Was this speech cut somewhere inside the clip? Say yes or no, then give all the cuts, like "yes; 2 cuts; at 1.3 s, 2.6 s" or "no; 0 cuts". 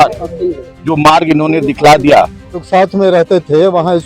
yes; 1 cut; at 2.6 s